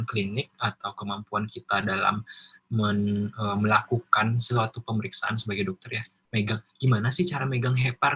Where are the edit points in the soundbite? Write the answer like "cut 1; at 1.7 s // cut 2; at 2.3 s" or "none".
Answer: none